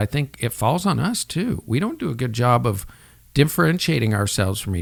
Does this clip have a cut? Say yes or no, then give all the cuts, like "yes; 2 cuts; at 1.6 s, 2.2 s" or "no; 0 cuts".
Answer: no; 0 cuts